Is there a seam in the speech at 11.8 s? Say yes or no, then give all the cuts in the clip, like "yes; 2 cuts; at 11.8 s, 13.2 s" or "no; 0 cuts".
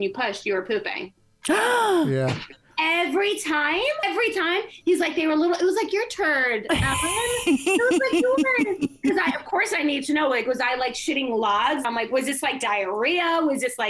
yes; 2 cuts; at 4.0 s, 11.8 s